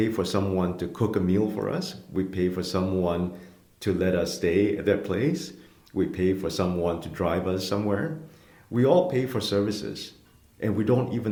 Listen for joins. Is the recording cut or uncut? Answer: uncut